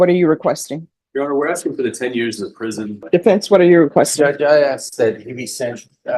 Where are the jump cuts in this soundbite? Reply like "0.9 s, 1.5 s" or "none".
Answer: 3.0 s